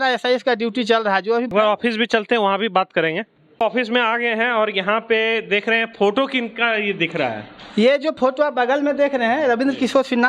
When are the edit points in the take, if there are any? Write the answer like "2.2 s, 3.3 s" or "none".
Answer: none